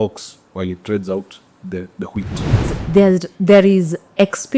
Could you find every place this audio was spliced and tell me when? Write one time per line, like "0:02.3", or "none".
0:02.8

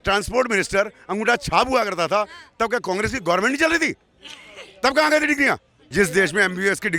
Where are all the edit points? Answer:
0:05.8

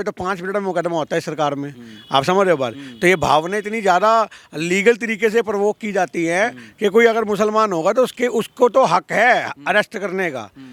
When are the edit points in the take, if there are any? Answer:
none

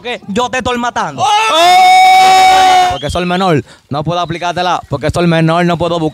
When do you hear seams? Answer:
0:02.9

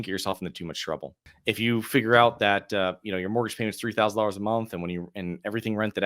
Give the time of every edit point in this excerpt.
0:01.2

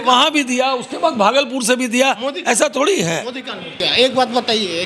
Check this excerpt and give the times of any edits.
0:03.8

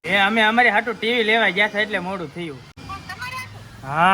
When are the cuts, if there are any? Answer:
0:02.8

